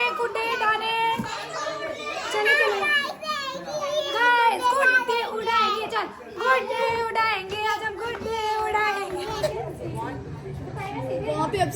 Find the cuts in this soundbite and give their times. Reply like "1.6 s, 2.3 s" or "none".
9.5 s